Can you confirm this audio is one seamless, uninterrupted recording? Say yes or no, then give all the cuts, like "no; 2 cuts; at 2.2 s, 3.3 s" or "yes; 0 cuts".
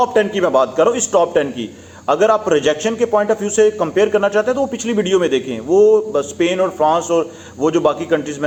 yes; 0 cuts